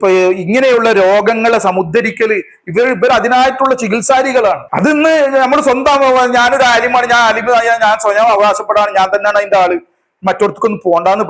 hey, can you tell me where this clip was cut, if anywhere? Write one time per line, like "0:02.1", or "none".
0:04.6